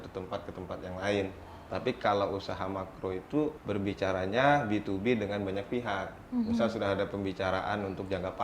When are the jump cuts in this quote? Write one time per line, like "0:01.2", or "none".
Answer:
0:03.6